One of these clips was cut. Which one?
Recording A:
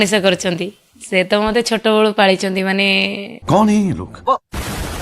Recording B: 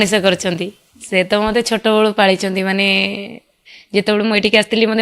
B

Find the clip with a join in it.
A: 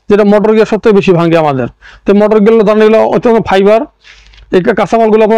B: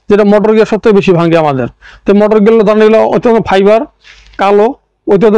B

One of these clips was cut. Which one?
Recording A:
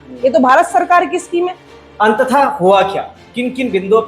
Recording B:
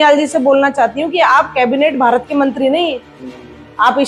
A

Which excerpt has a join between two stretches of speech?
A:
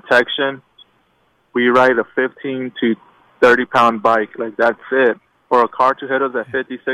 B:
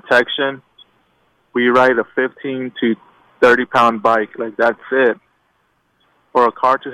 A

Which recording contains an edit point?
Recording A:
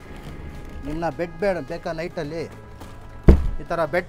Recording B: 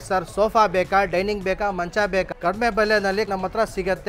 B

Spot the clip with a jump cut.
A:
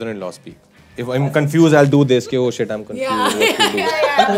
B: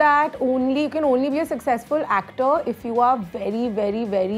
A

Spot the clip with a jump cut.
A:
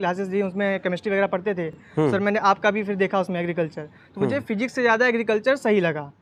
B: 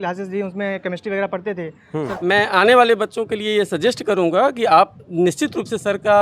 B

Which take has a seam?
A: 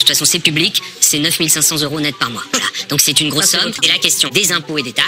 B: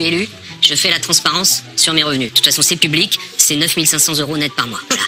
A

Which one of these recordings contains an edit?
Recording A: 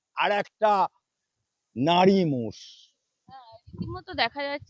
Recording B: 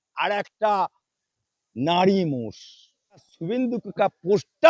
B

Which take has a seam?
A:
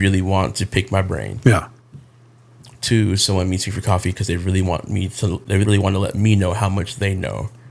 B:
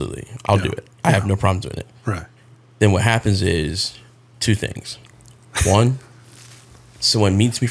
A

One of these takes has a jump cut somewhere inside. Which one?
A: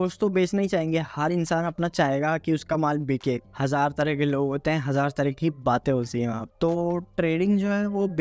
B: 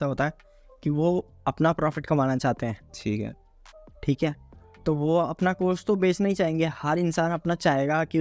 A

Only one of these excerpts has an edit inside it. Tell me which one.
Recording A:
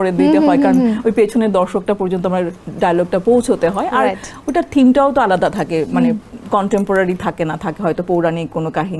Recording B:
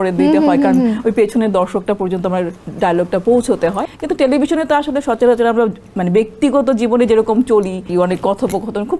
B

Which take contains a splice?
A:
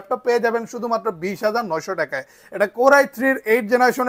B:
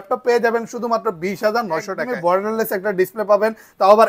B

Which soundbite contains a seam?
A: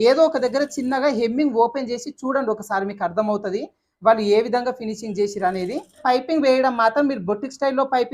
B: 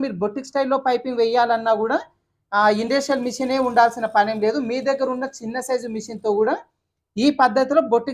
A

